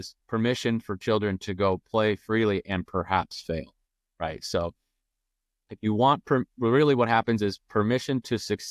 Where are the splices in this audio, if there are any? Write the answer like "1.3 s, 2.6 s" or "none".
none